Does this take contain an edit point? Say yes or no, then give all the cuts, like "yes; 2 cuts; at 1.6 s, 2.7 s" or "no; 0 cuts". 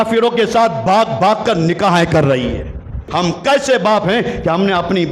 yes; 1 cut; at 3.0 s